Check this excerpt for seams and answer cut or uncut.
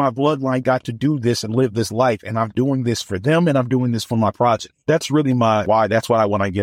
cut